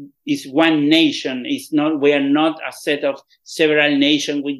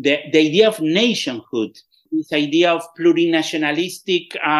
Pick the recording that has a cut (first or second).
second